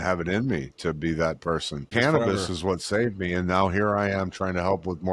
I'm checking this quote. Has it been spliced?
yes; 1 cut; at 1.9 s

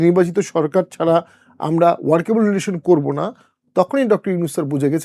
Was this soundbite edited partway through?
no; 0 cuts

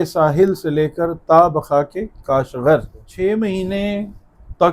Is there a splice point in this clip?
yes; 1 cut; at 3.0 s

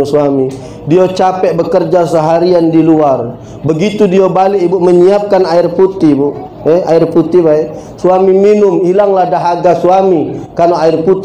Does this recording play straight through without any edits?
yes; 0 cuts

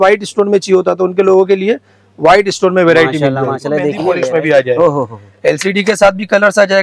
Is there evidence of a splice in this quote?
yes; 1 cut; at 4.0 s

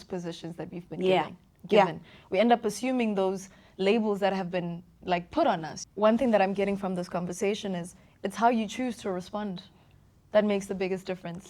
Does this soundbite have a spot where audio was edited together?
yes; 1 cut; at 5.7 s

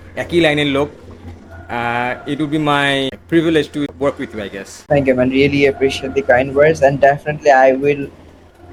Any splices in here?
no; 0 cuts

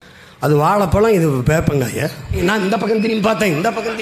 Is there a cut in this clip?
yes; 1 cut; at 2.4 s

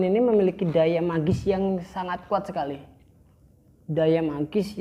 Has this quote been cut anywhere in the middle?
no; 0 cuts

